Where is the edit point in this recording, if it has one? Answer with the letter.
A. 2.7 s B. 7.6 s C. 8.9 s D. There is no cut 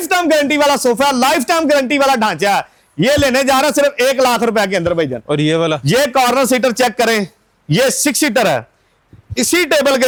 D